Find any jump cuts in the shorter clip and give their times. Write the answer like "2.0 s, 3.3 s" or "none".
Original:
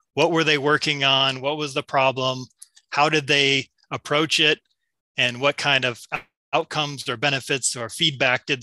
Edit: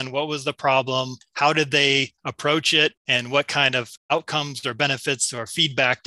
1.2 s, 2.2 s, 3.0 s, 3.9 s